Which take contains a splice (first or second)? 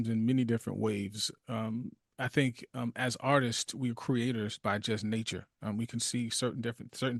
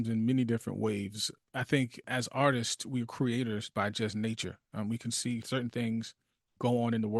second